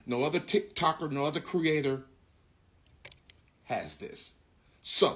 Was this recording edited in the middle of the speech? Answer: yes; 1 cut; at 2.1 s

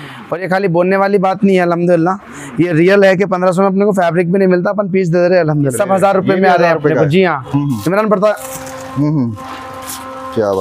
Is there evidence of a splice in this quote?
yes; 1 cut; at 5.7 s

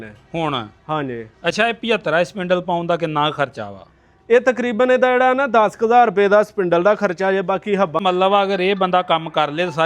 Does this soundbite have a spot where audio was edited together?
yes; 1 cut; at 8.0 s

